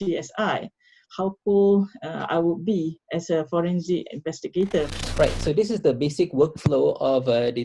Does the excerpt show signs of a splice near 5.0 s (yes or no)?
yes